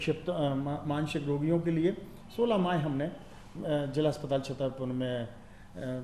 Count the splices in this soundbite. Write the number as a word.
zero